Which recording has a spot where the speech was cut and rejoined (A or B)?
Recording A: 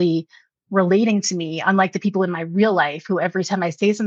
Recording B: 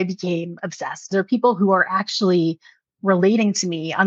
B